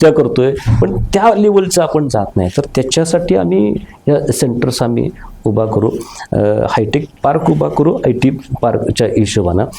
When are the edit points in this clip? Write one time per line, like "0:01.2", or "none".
none